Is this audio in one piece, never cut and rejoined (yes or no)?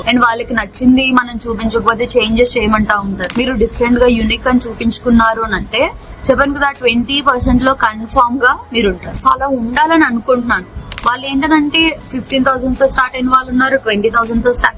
no